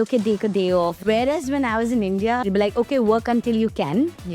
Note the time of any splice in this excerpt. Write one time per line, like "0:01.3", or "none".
0:01.0
0:02.4